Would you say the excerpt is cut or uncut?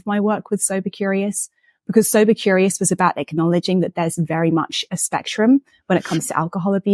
uncut